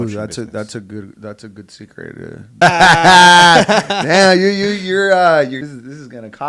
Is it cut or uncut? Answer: cut